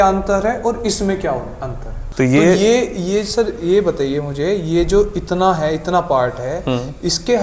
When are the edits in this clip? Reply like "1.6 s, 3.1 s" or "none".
2.0 s